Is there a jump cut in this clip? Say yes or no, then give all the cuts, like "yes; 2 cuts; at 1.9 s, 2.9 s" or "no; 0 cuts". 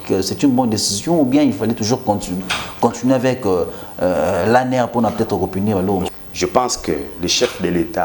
yes; 1 cut; at 6.1 s